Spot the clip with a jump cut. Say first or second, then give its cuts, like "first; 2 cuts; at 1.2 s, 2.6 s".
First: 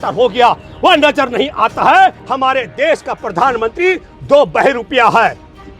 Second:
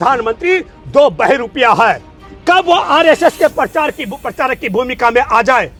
first; 1 cut; at 2.2 s